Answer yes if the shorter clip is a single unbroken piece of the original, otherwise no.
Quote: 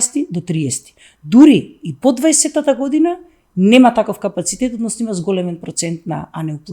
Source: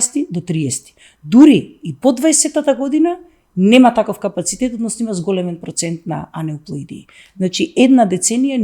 yes